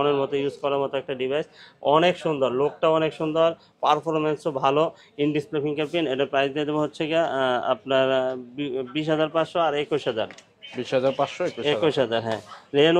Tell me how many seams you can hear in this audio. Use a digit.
0